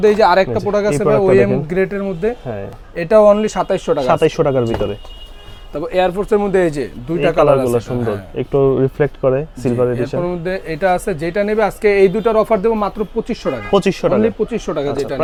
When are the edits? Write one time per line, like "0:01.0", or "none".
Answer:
none

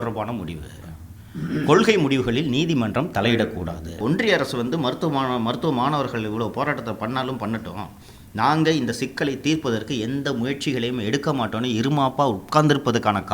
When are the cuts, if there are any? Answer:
0:04.0

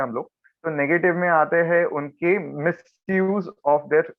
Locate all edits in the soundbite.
none

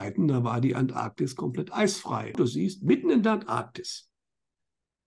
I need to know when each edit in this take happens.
0:02.3

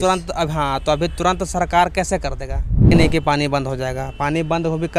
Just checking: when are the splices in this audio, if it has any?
0:02.9

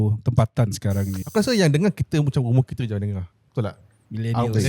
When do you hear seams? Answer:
0:01.2

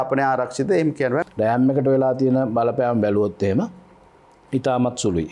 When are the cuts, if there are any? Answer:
0:01.2

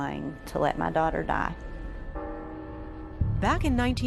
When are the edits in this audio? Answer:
none

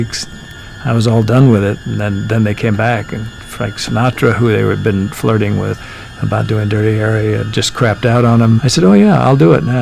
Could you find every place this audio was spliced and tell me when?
0:05.8
0:07.5
0:08.6

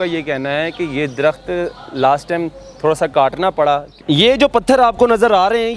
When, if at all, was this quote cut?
0:03.9

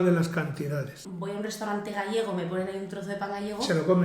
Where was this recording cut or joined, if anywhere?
0:01.0

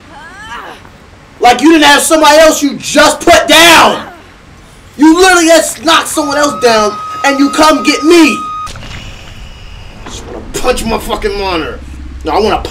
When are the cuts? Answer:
0:08.7

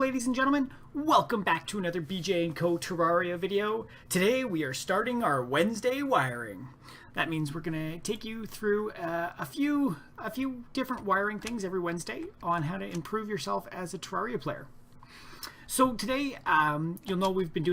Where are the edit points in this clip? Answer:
none

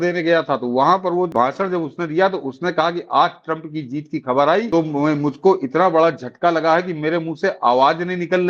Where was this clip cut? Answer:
0:01.3
0:04.7

